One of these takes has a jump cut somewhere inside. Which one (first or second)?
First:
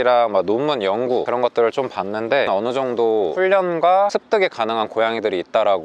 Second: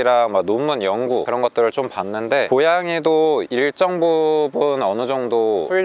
first